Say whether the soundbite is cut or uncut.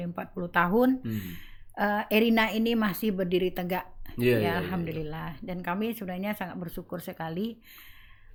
uncut